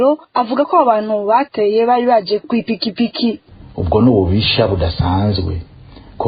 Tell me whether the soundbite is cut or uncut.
cut